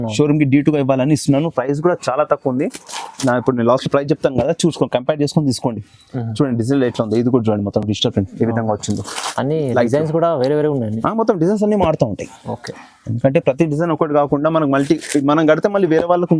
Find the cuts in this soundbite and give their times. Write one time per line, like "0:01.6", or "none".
none